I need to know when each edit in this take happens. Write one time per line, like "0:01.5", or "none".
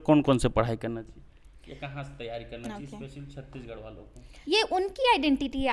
0:04.3